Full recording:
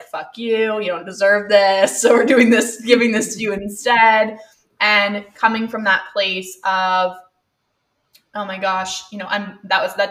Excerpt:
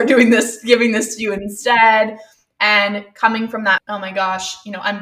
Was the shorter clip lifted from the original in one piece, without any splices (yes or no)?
no